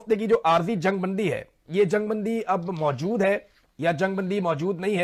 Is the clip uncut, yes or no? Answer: yes